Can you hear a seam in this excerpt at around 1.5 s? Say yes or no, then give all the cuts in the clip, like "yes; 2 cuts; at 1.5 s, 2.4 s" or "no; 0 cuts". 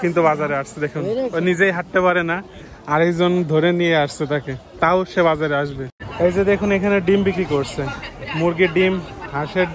no; 1 cut; at 6.0 s